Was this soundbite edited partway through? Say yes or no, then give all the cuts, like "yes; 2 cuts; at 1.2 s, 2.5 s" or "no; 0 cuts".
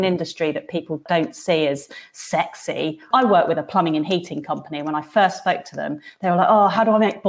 yes; 2 cuts; at 1.0 s, 3.0 s